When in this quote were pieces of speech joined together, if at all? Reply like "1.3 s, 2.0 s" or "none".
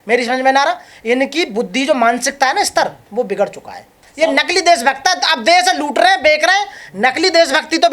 4.0 s